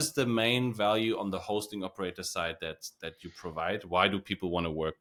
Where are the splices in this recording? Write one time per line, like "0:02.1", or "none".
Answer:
none